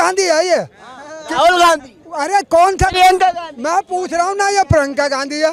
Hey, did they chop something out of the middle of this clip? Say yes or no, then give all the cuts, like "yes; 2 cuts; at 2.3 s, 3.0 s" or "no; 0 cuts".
no; 0 cuts